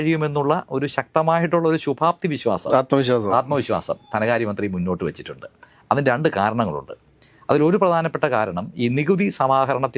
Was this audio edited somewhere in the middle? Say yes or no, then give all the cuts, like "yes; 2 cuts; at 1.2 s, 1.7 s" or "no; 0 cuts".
no; 0 cuts